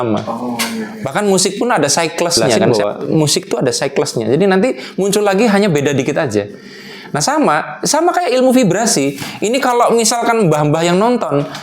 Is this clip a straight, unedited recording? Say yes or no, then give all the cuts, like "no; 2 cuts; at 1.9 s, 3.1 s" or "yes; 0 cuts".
no; 1 cut; at 2.6 s